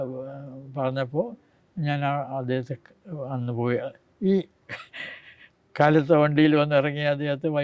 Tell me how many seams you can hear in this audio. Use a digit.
0